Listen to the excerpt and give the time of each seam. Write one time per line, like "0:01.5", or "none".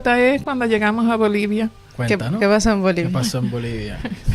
0:01.9